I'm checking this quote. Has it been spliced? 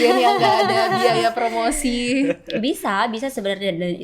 no; 0 cuts

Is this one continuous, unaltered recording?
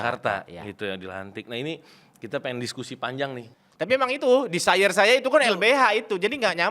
no; 1 cut; at 3.5 s

